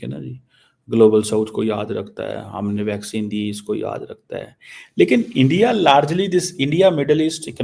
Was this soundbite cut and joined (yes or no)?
no